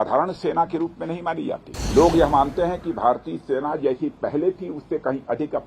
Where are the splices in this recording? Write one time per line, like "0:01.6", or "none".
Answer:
0:01.7